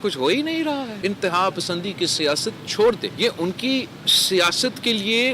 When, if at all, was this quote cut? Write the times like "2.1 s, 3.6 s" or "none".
0.9 s, 3.1 s